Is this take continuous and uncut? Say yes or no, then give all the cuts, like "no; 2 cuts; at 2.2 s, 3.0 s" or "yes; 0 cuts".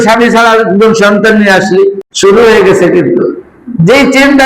no; 1 cut; at 2.1 s